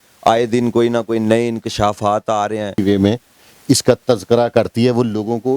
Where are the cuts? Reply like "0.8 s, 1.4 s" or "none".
2.8 s